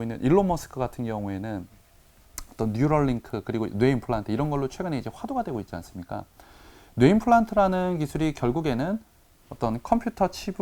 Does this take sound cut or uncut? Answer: uncut